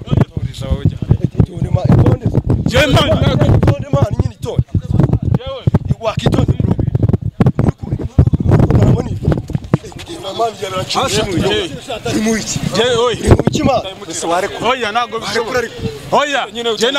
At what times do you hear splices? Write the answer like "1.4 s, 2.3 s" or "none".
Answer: none